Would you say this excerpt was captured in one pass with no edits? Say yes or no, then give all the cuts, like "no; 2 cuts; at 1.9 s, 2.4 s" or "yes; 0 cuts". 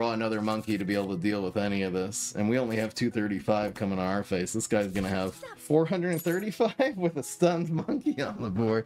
no; 1 cut; at 5.5 s